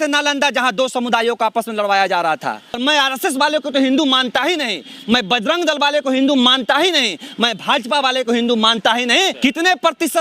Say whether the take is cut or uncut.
cut